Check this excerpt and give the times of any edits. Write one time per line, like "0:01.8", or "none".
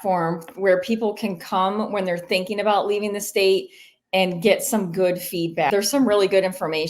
0:05.7